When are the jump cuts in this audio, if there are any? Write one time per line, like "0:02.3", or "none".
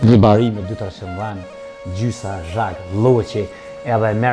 none